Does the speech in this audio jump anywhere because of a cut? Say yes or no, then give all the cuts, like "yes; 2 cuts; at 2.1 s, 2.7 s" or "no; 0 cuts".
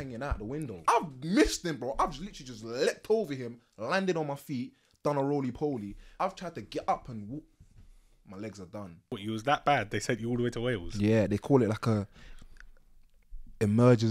yes; 3 cuts; at 0.8 s, 6.0 s, 9.2 s